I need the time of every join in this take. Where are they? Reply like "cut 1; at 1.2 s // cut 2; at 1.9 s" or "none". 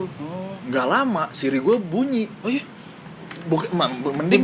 none